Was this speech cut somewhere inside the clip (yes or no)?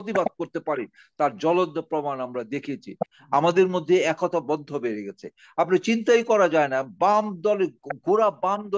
yes